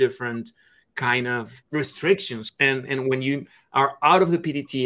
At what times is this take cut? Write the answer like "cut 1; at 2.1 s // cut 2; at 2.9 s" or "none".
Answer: cut 1; at 1.6 s // cut 2; at 2.4 s